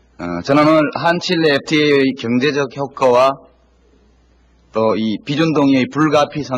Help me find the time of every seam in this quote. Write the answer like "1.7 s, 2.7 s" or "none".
3.6 s